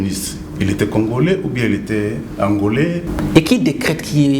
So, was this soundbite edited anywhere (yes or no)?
yes